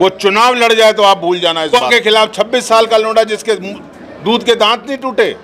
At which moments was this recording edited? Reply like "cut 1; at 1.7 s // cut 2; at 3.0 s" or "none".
cut 1; at 1.7 s